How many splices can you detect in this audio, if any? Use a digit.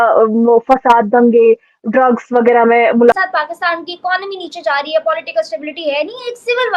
1